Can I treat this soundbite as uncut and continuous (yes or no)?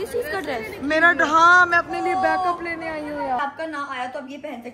no